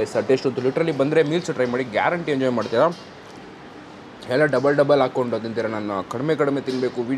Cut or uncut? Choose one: uncut